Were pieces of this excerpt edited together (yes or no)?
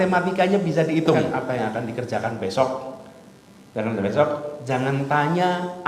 yes